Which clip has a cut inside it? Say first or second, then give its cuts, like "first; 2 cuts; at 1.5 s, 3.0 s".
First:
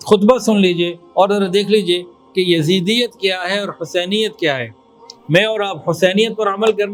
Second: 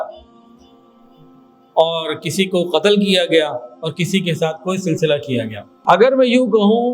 second; 1 cut; at 5.6 s